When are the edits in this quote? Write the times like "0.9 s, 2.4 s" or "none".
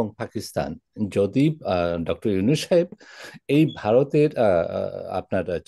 none